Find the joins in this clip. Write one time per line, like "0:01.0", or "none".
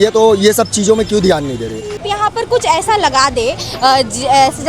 0:02.0